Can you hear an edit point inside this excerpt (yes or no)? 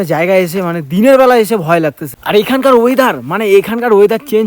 yes